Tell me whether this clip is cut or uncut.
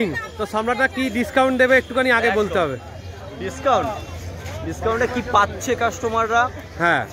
uncut